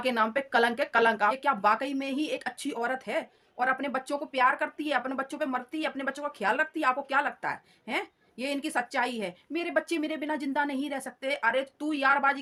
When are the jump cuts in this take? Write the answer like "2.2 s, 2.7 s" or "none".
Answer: none